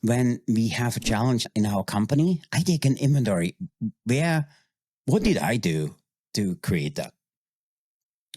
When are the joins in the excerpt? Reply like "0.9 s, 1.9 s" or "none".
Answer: 1.5 s